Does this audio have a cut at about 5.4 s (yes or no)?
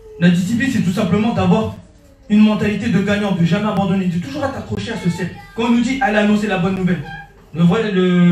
yes